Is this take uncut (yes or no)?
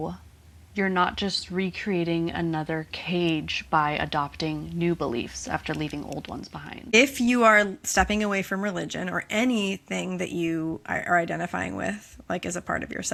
yes